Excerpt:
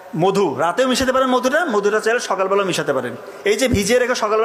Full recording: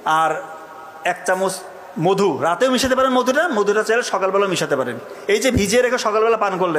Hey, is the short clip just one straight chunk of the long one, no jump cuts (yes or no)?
yes